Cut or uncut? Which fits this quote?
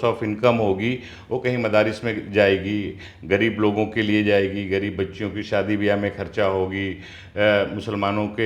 uncut